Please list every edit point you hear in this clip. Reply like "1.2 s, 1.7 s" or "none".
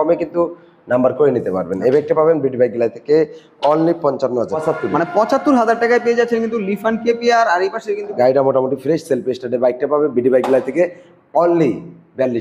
4.5 s, 8.1 s